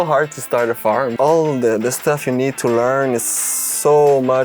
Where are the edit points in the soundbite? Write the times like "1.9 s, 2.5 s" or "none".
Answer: 1.1 s